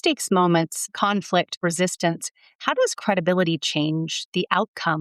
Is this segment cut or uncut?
cut